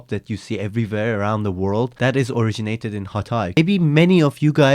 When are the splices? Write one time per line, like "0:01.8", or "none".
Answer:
0:01.9
0:03.6

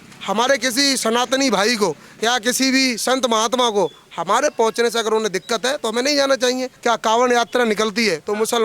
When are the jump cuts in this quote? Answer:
0:06.7

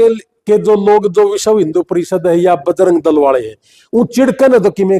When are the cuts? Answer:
none

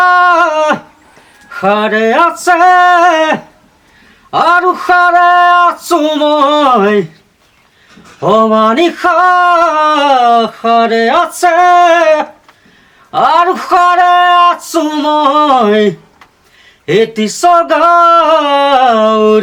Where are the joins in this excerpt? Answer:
none

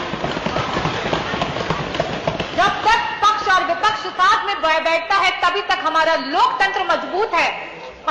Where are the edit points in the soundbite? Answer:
none

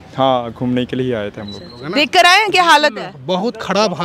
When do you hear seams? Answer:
0:01.7

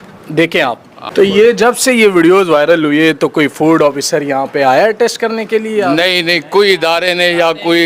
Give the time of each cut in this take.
0:01.1

